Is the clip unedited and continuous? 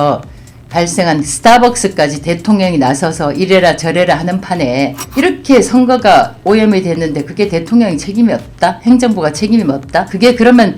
no; 1 cut; at 5.0 s

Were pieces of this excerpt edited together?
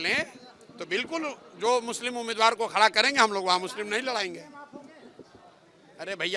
no; 0 cuts

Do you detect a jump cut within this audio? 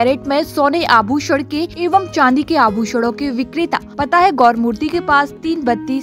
yes; 2 cuts; at 1.7 s, 3.9 s

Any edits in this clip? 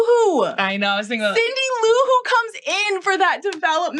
no; 0 cuts

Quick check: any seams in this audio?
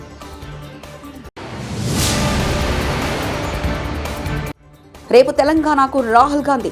no; 0 cuts

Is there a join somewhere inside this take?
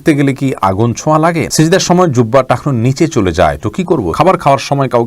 yes; 2 cuts; at 1.5 s, 4.1 s

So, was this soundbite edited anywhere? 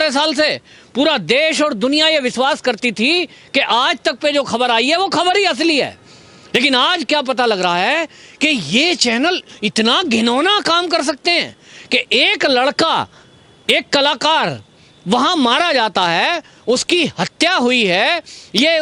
no; 0 cuts

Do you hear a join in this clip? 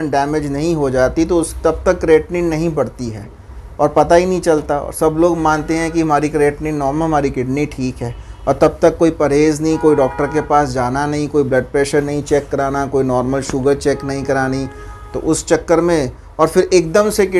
no; 0 cuts

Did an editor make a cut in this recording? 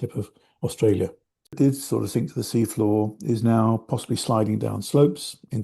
yes; 1 cut; at 1.5 s

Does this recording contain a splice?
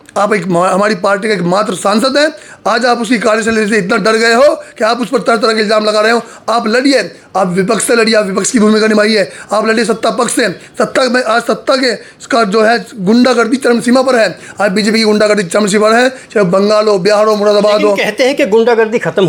no; 0 cuts

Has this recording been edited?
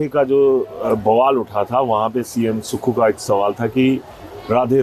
no; 0 cuts

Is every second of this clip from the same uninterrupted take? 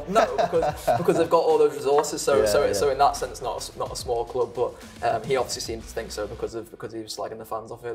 yes; 0 cuts

